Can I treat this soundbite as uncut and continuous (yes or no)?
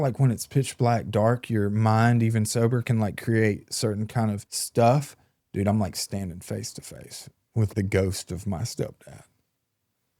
no